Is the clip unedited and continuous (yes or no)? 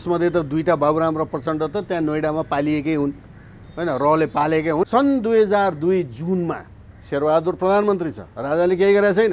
no